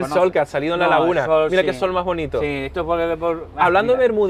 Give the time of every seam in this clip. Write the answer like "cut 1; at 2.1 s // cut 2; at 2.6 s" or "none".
none